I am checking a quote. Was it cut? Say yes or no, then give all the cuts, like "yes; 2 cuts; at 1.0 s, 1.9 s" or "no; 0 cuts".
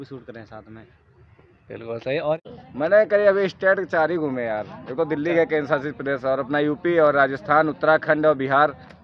yes; 1 cut; at 2.4 s